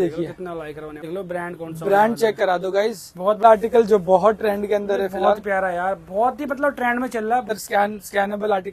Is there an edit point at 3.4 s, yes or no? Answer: yes